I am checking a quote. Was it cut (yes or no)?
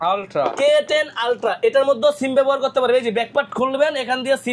no